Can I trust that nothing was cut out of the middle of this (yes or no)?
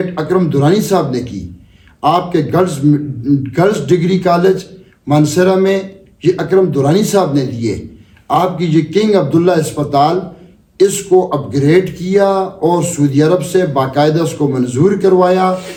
yes